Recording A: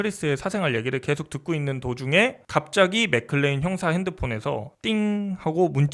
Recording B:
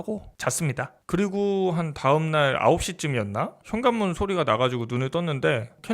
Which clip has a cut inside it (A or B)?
B